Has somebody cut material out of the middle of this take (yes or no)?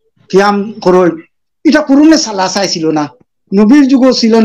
no